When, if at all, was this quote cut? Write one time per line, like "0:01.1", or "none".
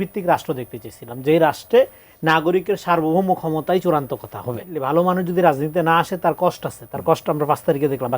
0:04.7